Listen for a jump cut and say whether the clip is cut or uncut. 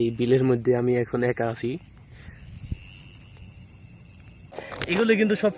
cut